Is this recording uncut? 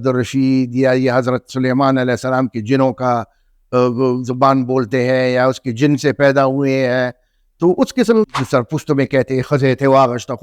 no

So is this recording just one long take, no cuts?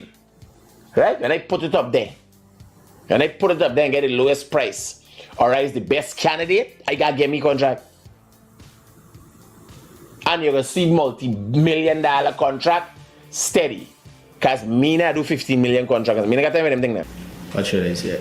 no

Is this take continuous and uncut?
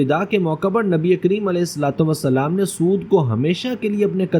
yes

